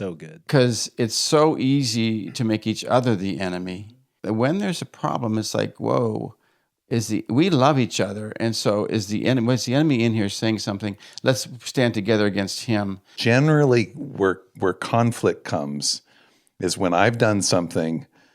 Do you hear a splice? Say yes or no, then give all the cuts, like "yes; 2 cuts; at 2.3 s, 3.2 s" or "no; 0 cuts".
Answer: yes; 2 cuts; at 4.1 s, 13.2 s